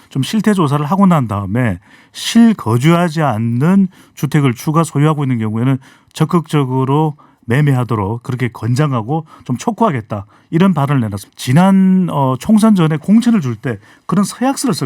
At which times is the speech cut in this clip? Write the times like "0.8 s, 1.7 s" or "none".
11.2 s